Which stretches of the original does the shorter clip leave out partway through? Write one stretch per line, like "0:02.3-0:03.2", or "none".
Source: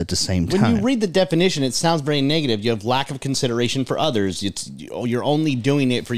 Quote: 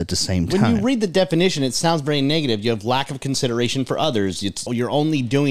0:04.6-0:04.9